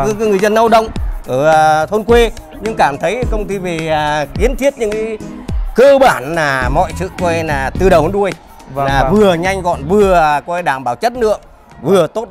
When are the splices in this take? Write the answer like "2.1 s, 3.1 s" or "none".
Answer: none